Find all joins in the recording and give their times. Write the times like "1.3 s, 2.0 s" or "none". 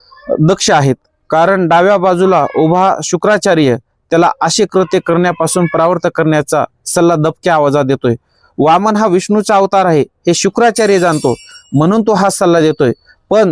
none